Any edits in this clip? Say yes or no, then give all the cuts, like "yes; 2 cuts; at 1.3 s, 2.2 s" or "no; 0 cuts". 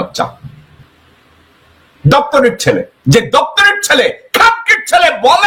no; 0 cuts